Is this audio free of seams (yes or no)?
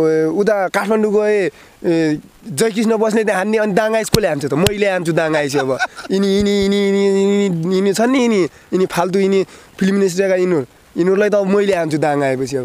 yes